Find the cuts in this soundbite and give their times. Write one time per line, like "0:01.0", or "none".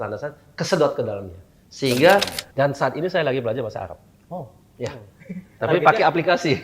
0:02.4